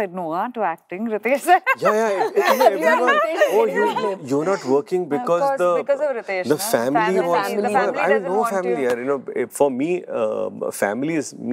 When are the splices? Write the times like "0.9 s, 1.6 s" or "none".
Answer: none